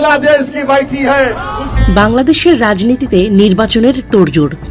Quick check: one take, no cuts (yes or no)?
no